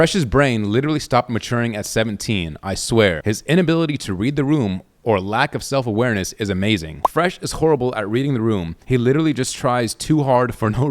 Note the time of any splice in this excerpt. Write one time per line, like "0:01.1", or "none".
0:03.2
0:06.9